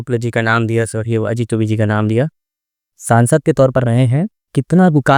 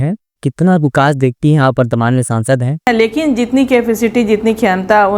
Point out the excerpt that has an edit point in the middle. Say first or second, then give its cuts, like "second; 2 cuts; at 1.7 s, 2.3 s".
second; 1 cut; at 2.9 s